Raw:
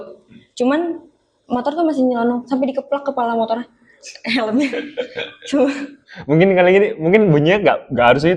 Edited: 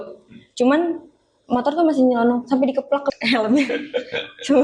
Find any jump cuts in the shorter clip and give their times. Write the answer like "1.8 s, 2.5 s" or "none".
3.1 s